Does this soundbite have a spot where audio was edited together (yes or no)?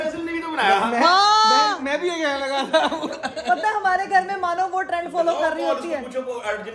no